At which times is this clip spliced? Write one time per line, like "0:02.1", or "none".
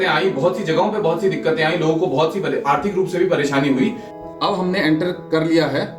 0:04.1